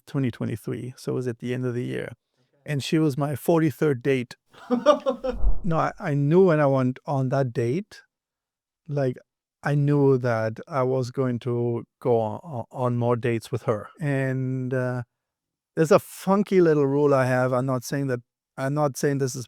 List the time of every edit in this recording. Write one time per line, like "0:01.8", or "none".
0:05.5
0:13.9